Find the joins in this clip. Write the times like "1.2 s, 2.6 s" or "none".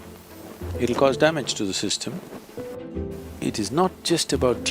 2.8 s